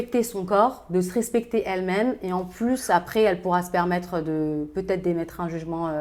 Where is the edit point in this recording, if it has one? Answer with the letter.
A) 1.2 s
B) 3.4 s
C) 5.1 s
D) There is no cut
D